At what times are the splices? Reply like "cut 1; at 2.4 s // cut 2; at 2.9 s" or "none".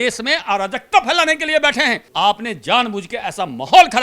cut 1; at 2.0 s